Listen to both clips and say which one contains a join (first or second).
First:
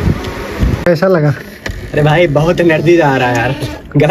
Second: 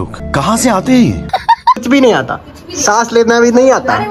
second